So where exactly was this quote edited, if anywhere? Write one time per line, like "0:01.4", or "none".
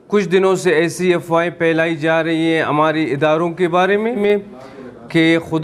0:04.2